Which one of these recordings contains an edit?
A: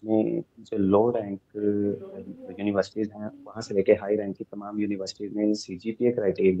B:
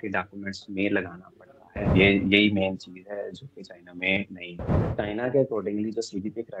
B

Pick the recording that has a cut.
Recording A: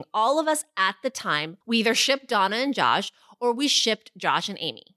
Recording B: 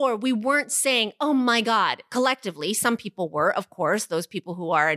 A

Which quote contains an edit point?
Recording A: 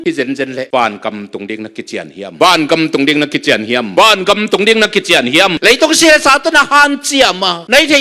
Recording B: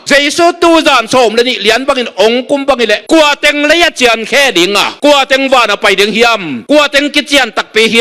A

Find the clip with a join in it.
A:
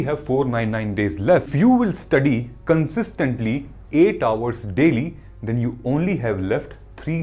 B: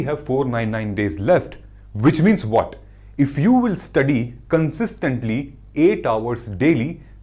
A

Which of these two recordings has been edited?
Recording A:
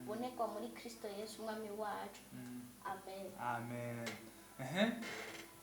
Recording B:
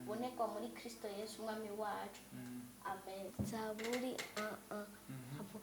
B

